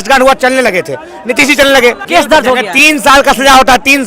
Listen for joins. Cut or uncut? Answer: cut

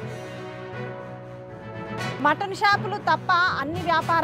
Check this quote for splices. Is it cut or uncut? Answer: cut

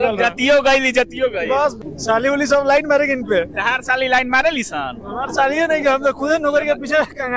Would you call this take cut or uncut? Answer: cut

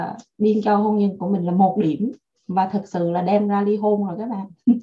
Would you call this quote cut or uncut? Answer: uncut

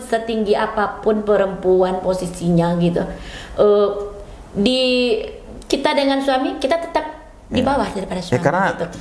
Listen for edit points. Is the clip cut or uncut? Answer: uncut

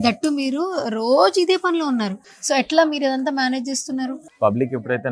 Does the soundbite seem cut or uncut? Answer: cut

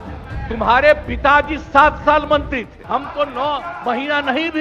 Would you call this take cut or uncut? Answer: cut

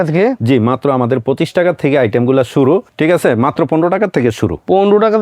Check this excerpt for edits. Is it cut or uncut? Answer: cut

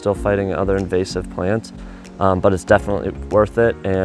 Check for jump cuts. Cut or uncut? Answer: uncut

